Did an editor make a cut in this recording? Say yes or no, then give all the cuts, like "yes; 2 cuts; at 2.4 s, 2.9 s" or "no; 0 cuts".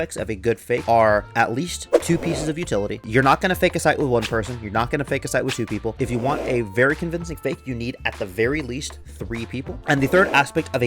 yes; 3 cuts; at 0.8 s, 3.1 s, 9.8 s